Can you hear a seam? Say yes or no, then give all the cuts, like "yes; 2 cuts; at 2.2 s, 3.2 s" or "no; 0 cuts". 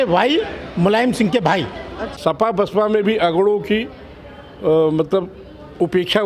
yes; 1 cut; at 2.1 s